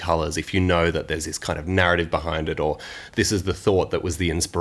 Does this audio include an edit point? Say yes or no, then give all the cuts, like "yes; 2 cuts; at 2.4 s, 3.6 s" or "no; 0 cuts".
no; 0 cuts